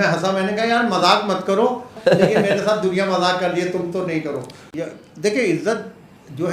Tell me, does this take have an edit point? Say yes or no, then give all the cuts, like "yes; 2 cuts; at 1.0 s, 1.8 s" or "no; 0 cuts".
yes; 2 cuts; at 1.9 s, 4.6 s